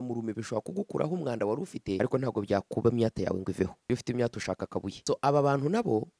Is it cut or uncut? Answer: cut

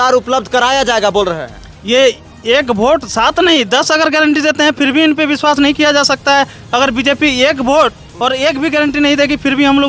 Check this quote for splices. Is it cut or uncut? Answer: uncut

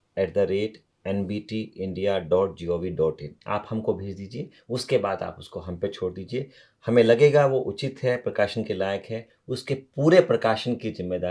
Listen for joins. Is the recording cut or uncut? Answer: cut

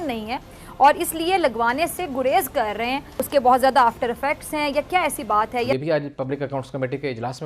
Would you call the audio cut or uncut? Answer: cut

